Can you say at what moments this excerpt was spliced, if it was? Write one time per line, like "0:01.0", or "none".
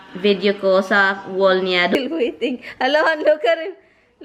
0:01.9